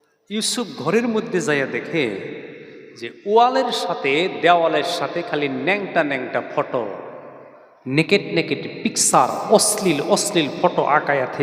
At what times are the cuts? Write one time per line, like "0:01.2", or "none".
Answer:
none